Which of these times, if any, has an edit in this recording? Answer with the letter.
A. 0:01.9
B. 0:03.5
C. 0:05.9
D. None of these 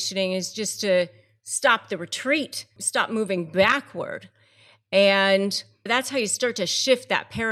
C